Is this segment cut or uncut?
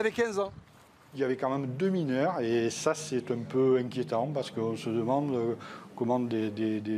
cut